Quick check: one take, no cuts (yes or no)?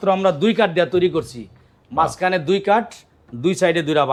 yes